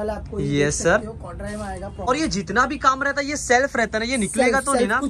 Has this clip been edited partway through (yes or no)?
yes